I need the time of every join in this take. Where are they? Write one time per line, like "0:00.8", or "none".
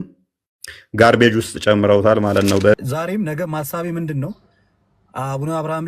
0:02.8